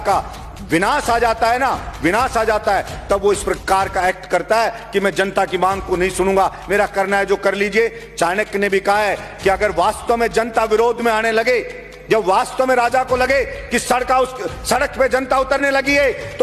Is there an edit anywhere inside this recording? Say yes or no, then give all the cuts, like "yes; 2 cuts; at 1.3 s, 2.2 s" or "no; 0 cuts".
no; 0 cuts